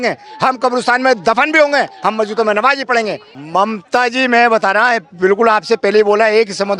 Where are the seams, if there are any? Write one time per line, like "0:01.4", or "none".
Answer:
0:03.3